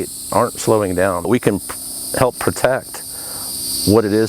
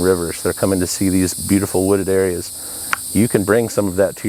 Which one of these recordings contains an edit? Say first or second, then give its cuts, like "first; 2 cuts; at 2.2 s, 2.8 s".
first; 1 cut; at 1.3 s